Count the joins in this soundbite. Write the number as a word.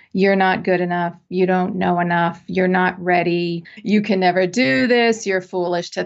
one